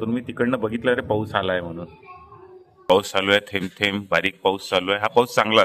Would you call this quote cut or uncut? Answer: cut